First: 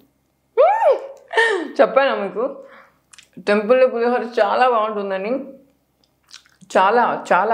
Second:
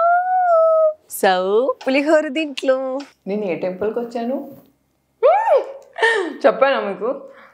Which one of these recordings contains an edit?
second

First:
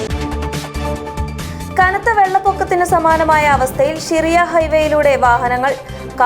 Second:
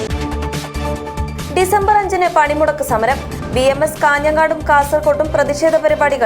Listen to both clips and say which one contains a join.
first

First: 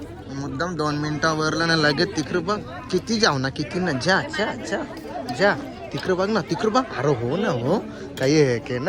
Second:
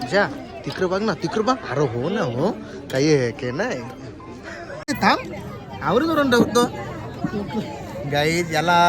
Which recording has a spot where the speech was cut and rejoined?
second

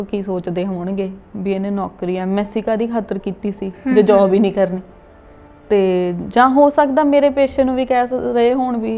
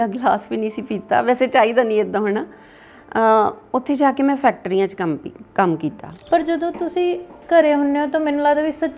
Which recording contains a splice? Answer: second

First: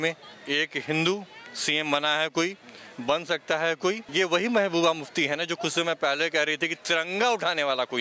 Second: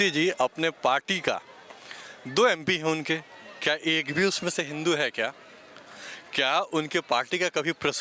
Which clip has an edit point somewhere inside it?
first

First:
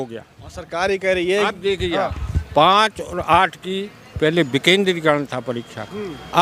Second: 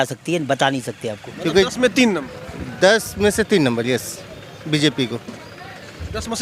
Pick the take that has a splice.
second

